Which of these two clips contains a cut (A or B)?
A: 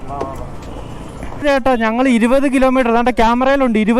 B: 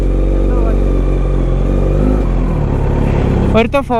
A